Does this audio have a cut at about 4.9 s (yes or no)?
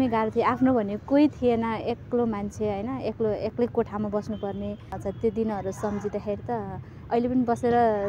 yes